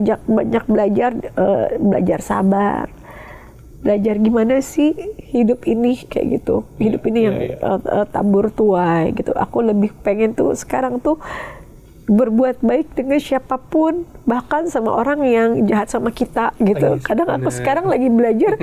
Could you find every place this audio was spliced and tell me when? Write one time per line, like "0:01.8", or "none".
none

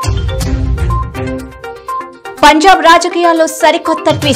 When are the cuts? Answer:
0:01.7

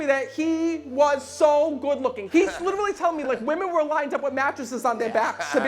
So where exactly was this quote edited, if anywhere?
0:02.2

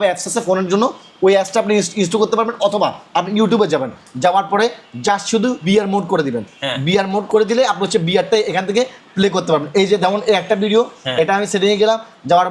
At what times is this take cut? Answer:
0:05.6
0:07.2

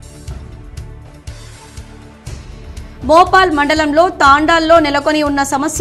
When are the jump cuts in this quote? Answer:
0:00.9

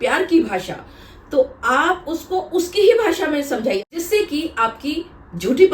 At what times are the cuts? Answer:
0:03.9

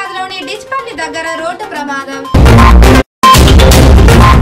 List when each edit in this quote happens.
0:03.0

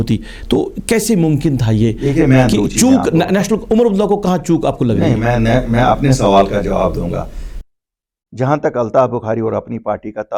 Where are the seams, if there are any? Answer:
none

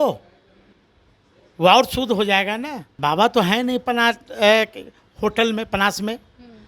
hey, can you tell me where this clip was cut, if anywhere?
0:02.9

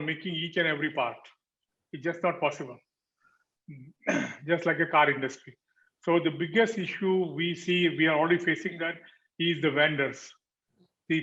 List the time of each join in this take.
none

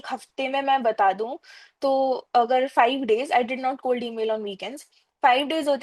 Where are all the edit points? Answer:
none

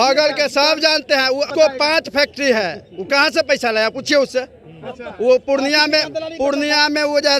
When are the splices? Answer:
0:01.5

